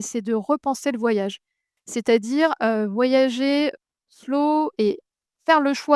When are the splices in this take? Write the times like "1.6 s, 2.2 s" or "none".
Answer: 1.7 s